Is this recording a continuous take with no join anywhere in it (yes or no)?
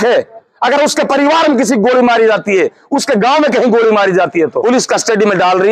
no